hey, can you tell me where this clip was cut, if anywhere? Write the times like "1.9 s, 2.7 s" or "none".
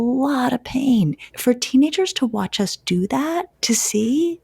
1.3 s, 3.5 s